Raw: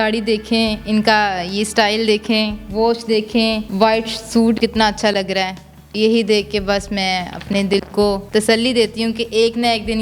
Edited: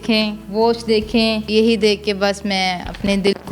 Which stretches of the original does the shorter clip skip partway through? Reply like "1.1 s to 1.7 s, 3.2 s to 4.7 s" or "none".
3.6 s to 5.9 s